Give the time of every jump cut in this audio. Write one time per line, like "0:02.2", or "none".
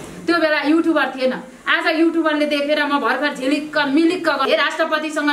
0:04.4